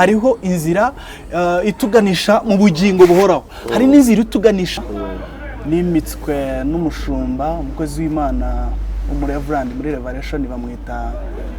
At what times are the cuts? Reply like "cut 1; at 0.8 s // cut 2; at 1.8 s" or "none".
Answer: cut 1; at 4.7 s